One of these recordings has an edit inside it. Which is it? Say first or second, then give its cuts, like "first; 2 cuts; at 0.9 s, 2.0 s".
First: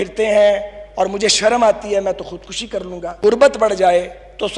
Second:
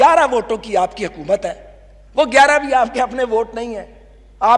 first; 1 cut; at 3.2 s